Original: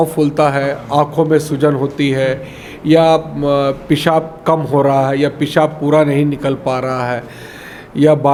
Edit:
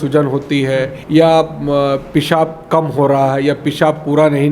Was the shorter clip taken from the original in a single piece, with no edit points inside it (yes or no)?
no